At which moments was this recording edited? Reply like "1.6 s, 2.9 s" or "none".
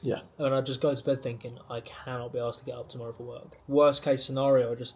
3.5 s